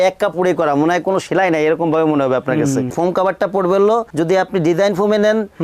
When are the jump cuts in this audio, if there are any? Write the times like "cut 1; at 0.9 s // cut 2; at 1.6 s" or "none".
cut 1; at 2.9 s